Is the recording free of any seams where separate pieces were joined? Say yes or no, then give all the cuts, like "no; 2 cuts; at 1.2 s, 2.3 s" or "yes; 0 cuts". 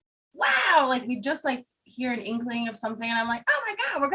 no; 1 cut; at 1.0 s